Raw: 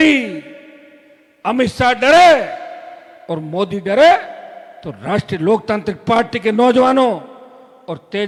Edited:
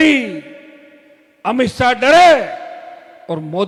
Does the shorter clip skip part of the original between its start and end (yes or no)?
no